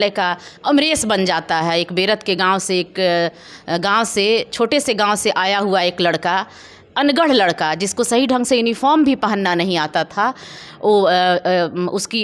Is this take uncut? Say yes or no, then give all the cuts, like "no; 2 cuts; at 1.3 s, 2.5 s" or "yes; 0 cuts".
yes; 0 cuts